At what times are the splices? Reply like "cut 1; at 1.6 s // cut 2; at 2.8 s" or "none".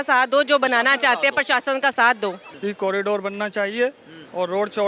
cut 1; at 2.5 s